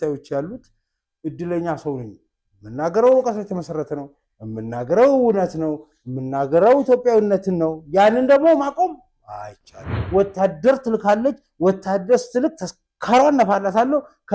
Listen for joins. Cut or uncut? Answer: cut